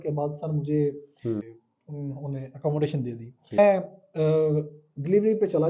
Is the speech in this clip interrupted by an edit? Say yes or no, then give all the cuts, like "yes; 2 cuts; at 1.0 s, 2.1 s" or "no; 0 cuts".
yes; 2 cuts; at 1.4 s, 3.6 s